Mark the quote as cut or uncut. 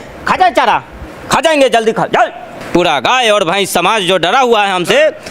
cut